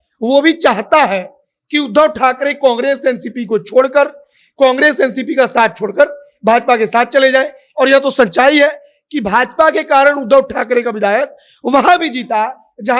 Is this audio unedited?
yes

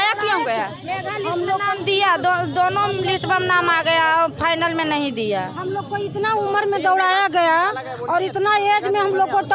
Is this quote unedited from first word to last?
yes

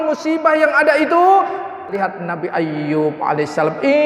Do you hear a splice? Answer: yes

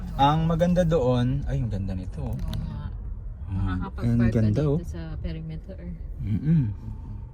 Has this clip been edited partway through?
no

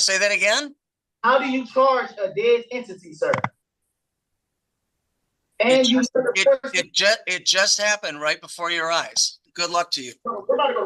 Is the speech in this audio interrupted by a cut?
yes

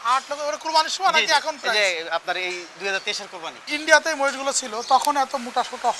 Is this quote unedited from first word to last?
no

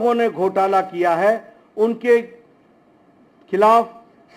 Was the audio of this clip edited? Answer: no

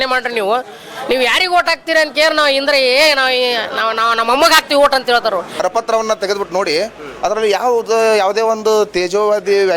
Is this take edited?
yes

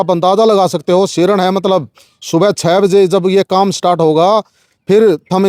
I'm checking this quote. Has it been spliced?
no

